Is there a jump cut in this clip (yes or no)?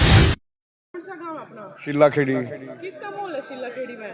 yes